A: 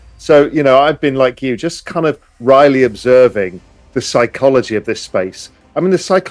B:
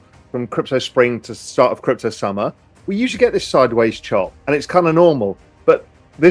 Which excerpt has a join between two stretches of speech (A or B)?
B